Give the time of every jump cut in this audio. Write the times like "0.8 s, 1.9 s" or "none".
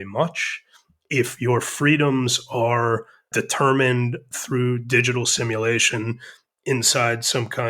3.3 s